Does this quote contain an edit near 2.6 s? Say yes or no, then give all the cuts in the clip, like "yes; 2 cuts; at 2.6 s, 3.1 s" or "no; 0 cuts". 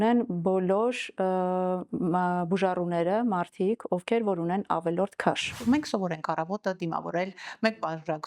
no; 1 cut; at 5.5 s